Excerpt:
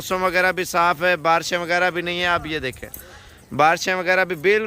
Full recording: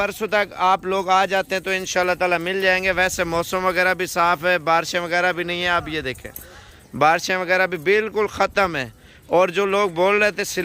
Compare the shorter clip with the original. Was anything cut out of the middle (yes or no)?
no